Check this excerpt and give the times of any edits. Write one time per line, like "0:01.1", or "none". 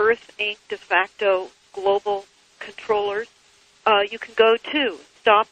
0:04.2